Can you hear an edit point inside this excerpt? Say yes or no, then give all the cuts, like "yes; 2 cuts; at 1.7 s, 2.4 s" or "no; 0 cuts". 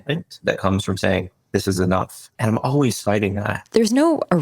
yes; 2 cuts; at 2.3 s, 3.5 s